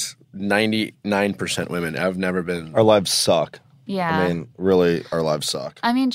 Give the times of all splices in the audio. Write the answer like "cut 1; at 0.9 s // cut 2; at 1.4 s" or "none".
cut 1; at 2.6 s